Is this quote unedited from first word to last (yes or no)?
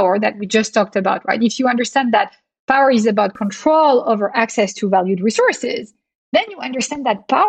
yes